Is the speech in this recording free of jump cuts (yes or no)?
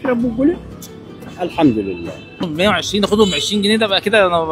no